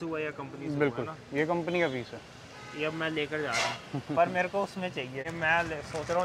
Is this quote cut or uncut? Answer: cut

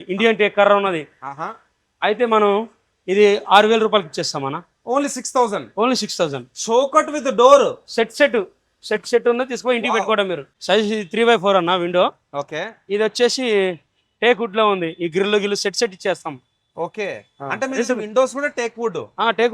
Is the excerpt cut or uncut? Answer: cut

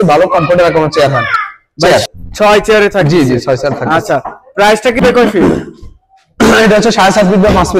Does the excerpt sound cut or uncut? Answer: cut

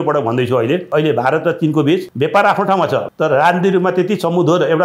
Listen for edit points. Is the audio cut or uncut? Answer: cut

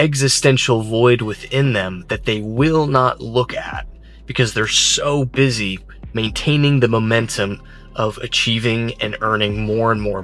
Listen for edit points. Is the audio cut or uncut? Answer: uncut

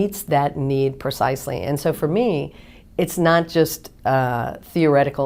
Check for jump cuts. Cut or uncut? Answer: uncut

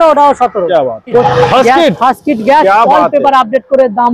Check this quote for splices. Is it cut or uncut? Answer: cut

